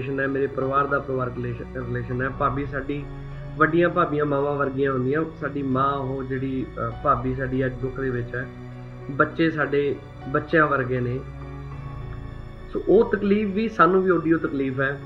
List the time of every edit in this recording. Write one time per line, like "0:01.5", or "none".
none